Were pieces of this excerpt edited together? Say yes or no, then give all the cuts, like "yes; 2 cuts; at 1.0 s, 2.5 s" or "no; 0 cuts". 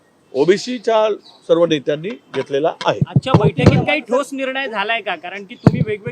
no; 0 cuts